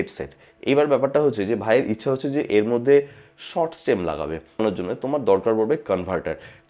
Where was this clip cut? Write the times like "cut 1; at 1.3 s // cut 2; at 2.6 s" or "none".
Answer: cut 1; at 4.6 s